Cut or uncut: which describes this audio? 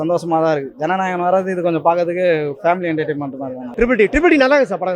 cut